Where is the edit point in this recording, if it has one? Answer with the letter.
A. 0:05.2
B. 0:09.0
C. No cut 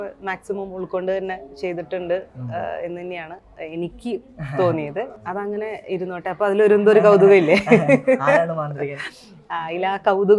A